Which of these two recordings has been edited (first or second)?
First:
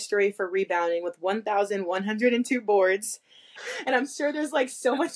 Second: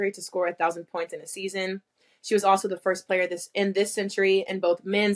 first